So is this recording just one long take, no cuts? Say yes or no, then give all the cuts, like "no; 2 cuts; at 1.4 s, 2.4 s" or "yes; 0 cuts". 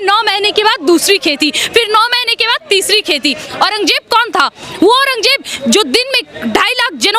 no; 1 cut; at 3.4 s